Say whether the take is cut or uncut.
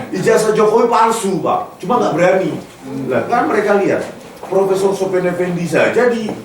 uncut